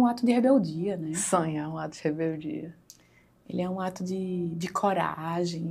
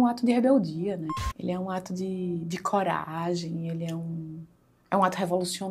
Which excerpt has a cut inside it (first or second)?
second